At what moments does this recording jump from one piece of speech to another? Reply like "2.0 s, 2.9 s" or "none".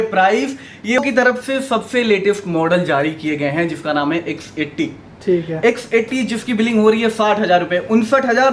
1.0 s